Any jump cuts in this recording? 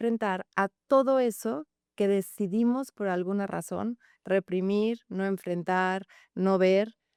no; 0 cuts

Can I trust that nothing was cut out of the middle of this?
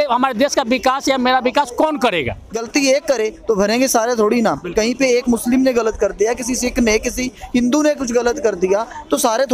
no; 1 cut; at 2.5 s

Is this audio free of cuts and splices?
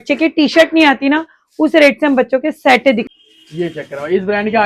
no; 1 cut; at 3.1 s

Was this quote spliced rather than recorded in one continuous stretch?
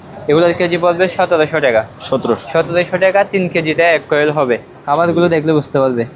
yes; 1 cut; at 4.7 s

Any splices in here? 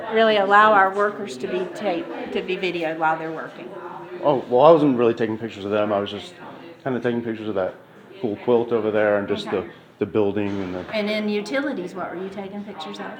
no; 0 cuts

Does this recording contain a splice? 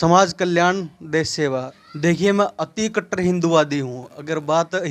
yes; 1 cut; at 1.8 s

